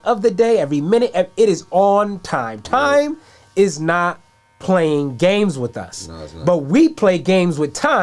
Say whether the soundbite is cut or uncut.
uncut